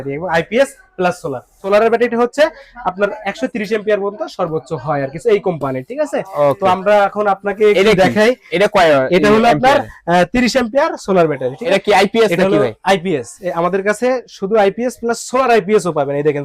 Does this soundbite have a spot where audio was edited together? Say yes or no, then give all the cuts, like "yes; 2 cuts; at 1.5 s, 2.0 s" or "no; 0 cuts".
yes; 2 cuts; at 1.6 s, 11.8 s